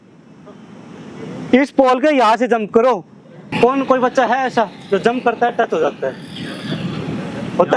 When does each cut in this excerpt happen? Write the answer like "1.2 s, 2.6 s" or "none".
3.5 s